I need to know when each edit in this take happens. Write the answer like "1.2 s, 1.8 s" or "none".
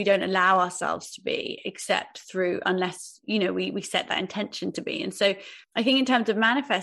5.5 s